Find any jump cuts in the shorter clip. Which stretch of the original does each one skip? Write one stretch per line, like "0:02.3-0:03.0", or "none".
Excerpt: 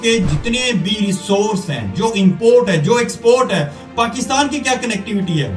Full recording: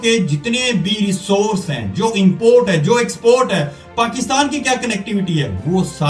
none